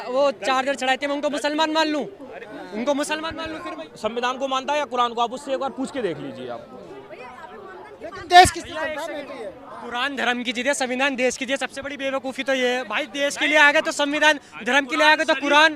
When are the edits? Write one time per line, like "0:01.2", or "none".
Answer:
0:03.8